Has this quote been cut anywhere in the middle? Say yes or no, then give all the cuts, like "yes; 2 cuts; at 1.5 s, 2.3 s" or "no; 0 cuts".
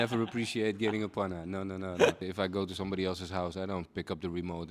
yes; 1 cut; at 2.3 s